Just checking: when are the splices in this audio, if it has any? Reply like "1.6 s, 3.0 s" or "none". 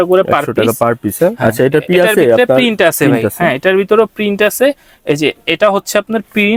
none